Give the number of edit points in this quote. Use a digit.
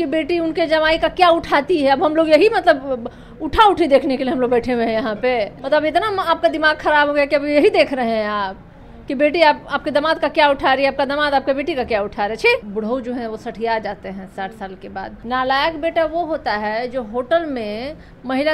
3